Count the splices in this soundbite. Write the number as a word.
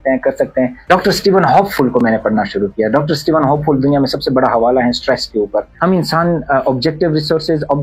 two